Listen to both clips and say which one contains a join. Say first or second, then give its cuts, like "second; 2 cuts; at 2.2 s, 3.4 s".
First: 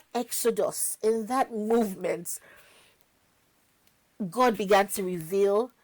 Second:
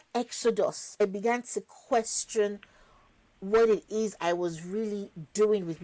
second; 1 cut; at 1.0 s